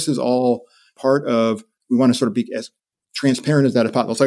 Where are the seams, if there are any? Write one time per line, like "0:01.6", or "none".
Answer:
0:00.9